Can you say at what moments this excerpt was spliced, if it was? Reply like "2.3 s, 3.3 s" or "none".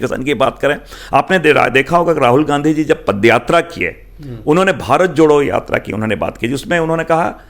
none